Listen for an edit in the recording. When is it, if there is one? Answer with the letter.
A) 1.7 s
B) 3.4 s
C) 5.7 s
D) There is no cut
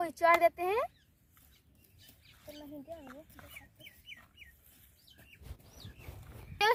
D